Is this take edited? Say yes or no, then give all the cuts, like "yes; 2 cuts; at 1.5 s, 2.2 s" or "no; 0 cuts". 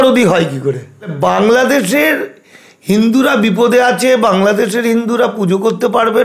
yes; 1 cut; at 1.1 s